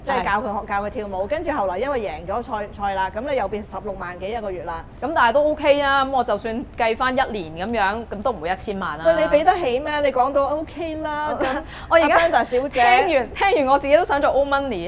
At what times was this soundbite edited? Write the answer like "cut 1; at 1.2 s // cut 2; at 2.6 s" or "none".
none